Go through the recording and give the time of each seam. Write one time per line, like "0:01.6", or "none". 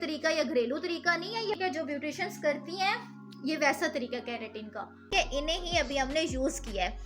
0:01.6
0:05.1